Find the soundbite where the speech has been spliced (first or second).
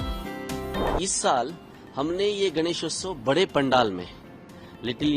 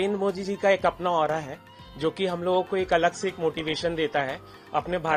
first